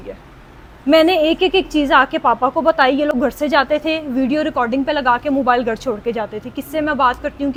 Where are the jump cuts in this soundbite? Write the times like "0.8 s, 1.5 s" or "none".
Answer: none